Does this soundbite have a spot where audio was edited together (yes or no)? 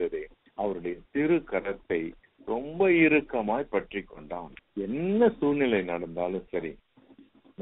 yes